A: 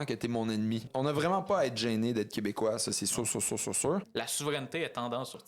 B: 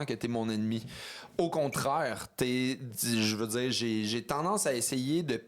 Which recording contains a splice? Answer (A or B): A